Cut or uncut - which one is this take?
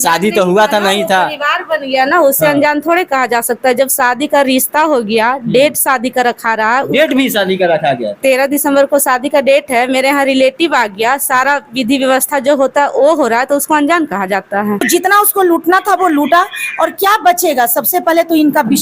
cut